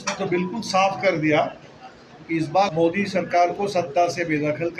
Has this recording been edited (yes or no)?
yes